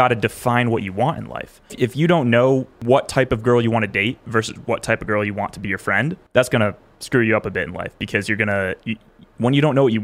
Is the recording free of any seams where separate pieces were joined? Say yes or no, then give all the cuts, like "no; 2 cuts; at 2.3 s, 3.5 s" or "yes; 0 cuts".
no; 3 cuts; at 1.7 s, 2.7 s, 6.2 s